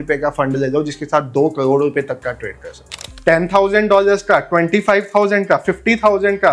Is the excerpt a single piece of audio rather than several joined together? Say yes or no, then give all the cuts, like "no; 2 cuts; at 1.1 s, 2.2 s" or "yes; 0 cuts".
no; 1 cut; at 3.1 s